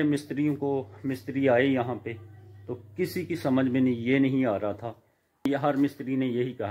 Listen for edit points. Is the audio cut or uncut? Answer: cut